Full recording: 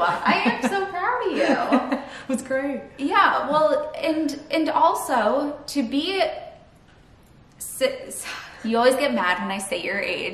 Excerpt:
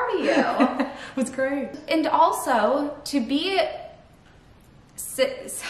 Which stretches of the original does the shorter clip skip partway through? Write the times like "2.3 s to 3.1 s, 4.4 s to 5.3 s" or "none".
2.9 s to 4.4 s